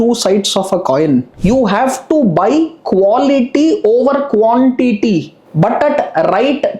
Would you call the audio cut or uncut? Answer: cut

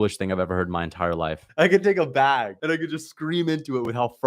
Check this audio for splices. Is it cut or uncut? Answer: cut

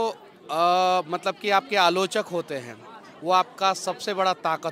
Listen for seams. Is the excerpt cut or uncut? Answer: uncut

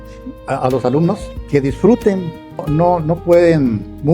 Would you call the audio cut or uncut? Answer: cut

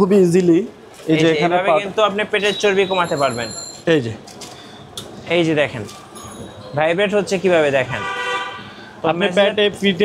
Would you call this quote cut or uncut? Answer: cut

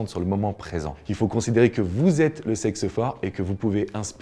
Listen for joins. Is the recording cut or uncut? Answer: cut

